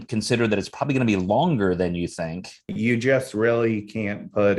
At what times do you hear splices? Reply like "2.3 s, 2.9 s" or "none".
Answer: 2.7 s